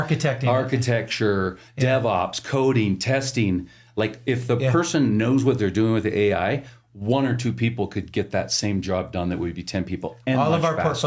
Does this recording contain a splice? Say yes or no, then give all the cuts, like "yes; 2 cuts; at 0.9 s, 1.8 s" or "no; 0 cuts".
no; 0 cuts